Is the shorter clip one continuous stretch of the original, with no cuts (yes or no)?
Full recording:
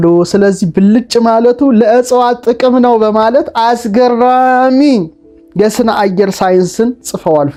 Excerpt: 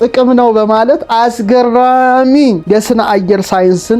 no